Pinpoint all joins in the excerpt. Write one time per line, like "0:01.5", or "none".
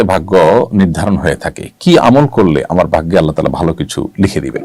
none